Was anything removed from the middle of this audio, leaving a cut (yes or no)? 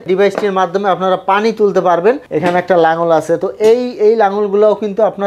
yes